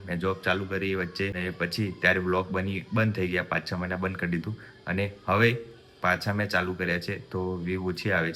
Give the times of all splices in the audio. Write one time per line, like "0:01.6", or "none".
0:01.4